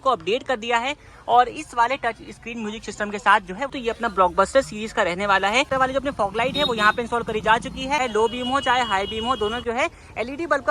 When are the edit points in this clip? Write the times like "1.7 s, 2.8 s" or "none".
3.7 s, 5.7 s, 8.0 s, 9.6 s